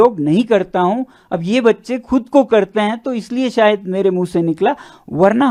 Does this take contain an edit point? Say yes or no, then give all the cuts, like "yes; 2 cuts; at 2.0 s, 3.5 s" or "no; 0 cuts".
no; 0 cuts